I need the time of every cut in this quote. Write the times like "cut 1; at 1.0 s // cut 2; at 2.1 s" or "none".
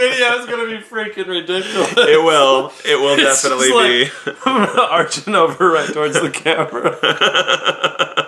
none